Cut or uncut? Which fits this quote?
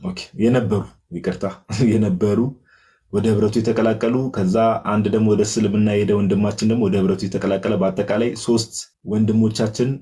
uncut